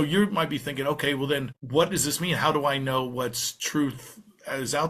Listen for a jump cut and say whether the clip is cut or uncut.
cut